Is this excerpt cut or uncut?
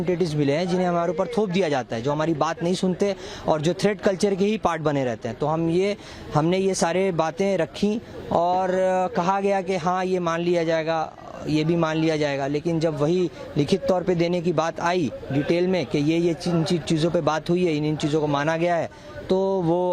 uncut